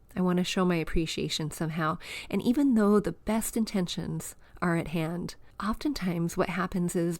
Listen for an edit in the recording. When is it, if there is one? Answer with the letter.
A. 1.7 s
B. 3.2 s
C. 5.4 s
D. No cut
C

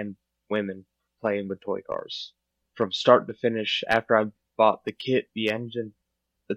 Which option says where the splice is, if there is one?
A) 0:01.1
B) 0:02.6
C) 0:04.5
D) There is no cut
B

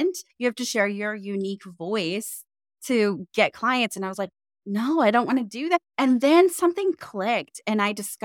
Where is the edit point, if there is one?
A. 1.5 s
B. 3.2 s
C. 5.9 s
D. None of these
C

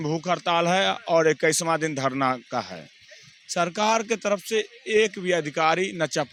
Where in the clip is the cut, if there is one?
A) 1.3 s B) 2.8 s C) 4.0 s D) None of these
D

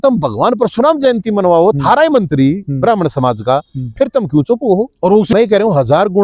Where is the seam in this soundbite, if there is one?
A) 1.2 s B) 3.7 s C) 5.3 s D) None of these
C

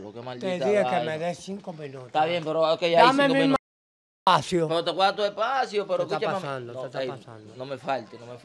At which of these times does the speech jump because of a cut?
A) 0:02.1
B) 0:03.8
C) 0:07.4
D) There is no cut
D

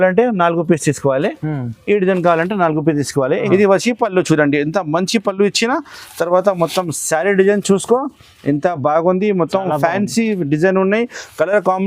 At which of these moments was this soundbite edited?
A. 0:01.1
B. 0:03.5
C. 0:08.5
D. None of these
B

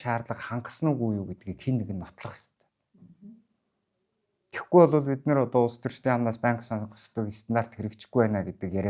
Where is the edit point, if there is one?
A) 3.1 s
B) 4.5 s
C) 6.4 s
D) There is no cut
D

